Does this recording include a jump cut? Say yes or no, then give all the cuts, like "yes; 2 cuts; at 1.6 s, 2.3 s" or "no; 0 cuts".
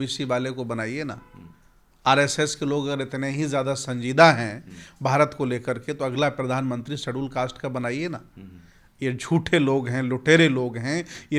no; 0 cuts